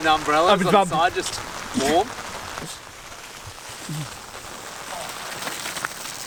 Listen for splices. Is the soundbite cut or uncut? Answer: uncut